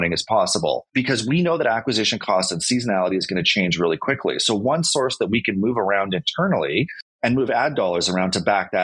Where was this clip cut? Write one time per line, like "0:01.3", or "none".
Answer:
none